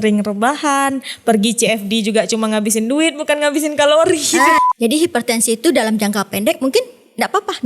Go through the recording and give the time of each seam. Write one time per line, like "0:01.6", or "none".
0:04.5